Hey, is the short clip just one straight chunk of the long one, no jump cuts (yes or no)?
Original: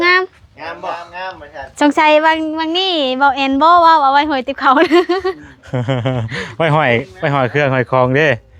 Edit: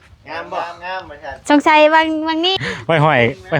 no